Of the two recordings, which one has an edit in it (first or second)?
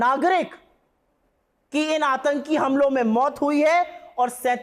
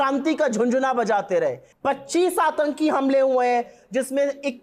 second